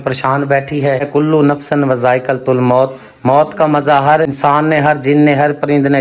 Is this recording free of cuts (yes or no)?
no